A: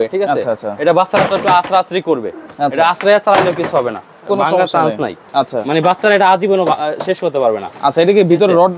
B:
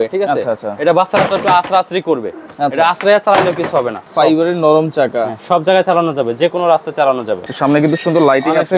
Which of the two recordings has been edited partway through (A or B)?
B